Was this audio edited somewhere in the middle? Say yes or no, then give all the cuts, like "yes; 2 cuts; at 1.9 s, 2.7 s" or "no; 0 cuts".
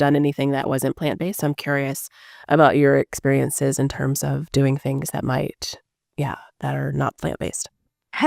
no; 0 cuts